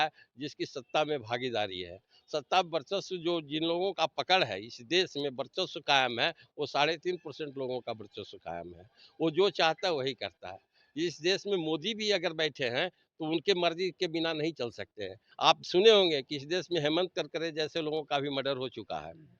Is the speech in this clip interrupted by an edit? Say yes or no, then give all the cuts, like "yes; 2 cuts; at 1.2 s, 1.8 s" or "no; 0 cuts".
yes; 1 cut; at 15.2 s